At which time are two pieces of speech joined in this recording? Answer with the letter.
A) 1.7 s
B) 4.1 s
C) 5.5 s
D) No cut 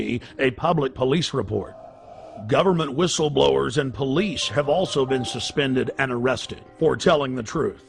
B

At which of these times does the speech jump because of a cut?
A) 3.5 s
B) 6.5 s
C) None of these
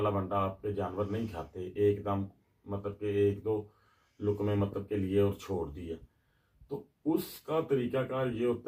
C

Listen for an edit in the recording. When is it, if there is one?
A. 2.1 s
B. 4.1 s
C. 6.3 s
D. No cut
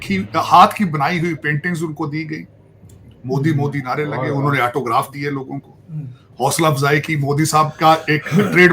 D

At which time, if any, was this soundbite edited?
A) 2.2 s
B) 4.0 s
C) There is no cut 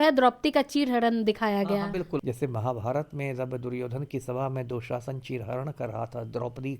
A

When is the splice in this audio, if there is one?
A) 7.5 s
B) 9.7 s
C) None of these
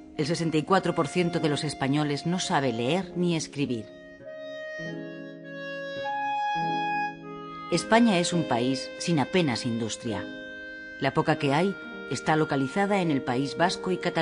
B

